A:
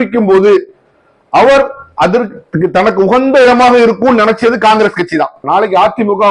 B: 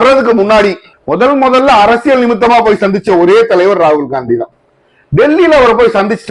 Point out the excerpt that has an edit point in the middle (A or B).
A